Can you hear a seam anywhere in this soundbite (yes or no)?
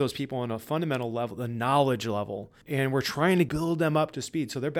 yes